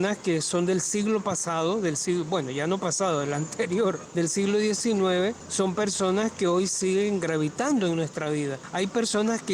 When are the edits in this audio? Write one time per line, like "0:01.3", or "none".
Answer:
0:04.0
0:05.4
0:08.6